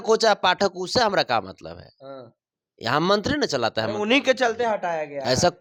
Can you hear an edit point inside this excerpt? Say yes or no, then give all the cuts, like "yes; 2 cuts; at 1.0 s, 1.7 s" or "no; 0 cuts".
no; 0 cuts